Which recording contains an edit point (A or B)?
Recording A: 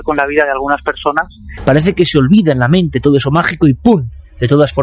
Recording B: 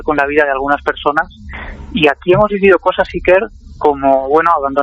A